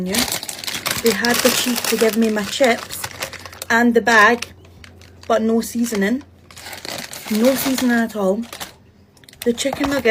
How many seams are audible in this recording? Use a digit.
0